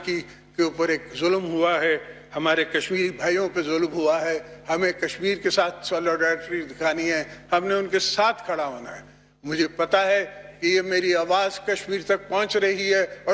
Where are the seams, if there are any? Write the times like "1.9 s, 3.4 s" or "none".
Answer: none